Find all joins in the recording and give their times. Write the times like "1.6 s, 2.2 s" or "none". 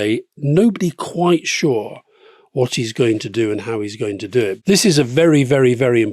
none